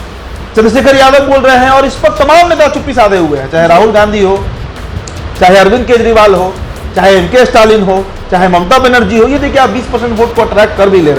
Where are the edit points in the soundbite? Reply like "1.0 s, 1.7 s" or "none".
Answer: 9.4 s